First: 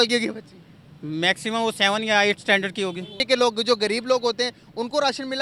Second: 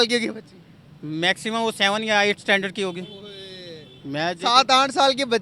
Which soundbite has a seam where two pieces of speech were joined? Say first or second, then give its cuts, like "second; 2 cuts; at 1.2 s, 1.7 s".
first; 1 cut; at 3.2 s